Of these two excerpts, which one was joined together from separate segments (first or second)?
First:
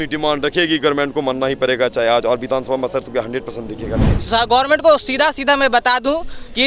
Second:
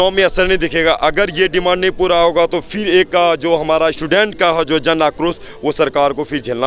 first